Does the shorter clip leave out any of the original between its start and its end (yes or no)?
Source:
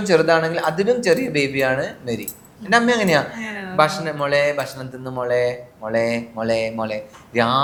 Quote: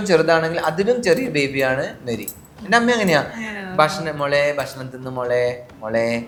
no